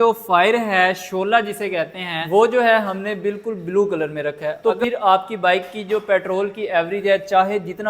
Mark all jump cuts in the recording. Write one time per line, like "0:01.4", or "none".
0:04.6

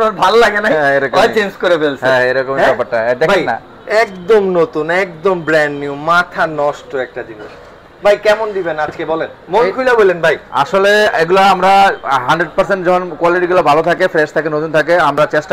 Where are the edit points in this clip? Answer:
none

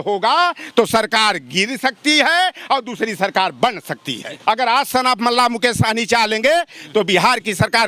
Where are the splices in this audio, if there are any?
0:04.3

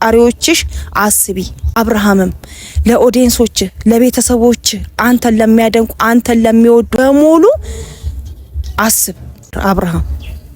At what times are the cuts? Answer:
0:01.7
0:06.9
0:09.6

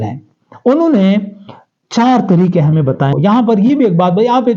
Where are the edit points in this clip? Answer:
0:03.1

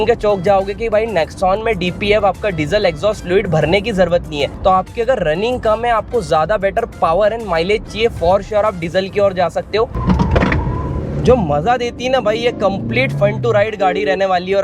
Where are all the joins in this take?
0:04.5
0:10.0

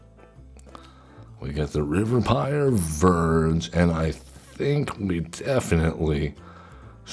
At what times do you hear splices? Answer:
none

